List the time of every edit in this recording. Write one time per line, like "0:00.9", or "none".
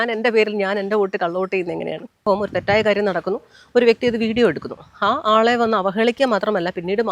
0:02.2